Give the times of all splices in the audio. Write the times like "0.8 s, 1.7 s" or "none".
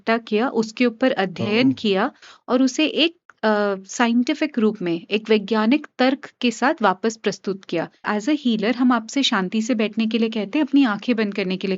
8.0 s

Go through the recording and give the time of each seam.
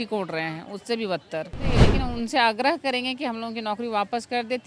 1.8 s

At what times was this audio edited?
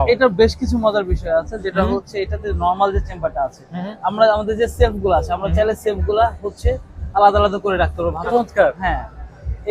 8.3 s

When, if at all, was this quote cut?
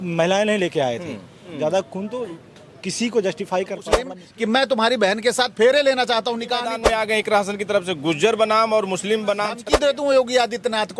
1.4 s, 4.2 s, 6.7 s, 9.6 s

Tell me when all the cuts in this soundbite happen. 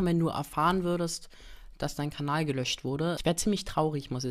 none

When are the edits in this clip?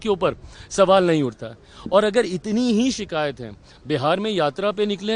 none

